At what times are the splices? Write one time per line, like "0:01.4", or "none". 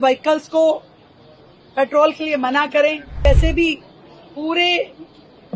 0:03.3